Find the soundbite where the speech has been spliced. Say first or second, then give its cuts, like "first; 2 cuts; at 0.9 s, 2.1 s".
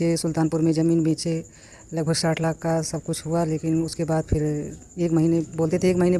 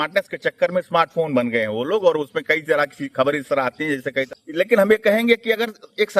second; 1 cut; at 4.3 s